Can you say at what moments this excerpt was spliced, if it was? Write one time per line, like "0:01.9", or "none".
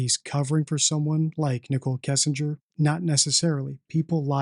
0:02.6